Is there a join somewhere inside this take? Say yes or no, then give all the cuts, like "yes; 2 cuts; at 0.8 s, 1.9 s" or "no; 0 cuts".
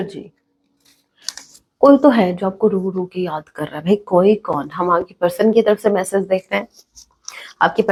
no; 0 cuts